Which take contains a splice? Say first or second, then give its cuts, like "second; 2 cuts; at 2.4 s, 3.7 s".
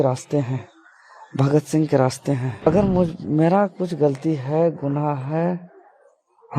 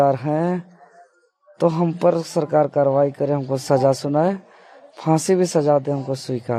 first; 1 cut; at 2.6 s